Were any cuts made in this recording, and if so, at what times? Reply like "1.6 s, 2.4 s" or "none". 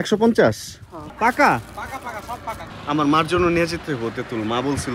1.0 s, 2.6 s